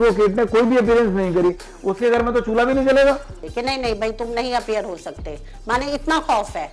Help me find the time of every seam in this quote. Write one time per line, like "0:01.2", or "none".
0:03.3